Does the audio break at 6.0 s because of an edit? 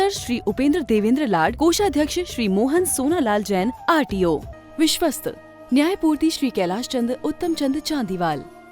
no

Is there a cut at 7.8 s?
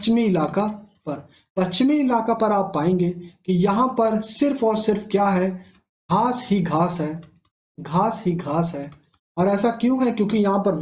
no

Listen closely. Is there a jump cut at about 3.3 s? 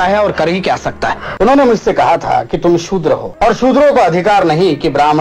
yes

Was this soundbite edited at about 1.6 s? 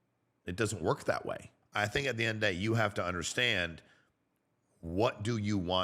yes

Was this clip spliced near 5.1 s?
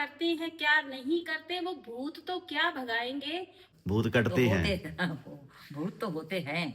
no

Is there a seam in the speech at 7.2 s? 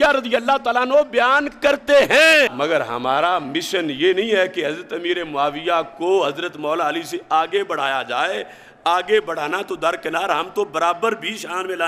no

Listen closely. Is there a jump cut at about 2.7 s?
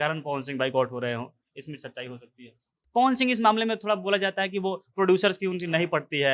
yes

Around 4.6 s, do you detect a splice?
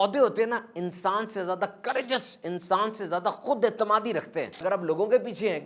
yes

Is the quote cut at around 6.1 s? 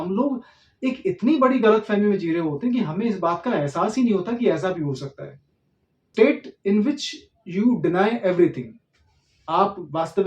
yes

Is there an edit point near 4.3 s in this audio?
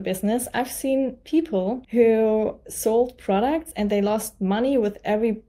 no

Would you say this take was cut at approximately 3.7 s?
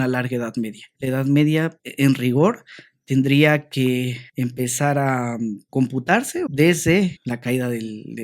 no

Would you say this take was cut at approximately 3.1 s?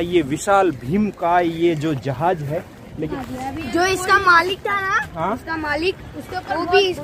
yes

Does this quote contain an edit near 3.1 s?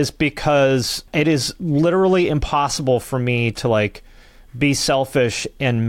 no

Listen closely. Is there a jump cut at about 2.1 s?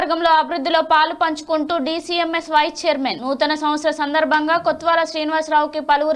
no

